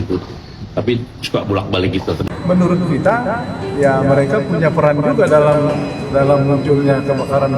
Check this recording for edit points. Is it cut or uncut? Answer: cut